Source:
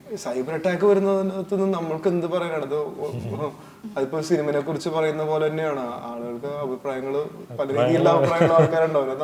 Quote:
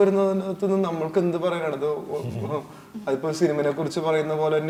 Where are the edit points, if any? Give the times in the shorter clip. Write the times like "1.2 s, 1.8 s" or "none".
none